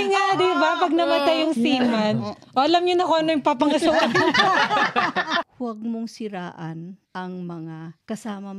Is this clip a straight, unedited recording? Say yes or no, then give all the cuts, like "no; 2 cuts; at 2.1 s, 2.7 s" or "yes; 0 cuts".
no; 1 cut; at 5.5 s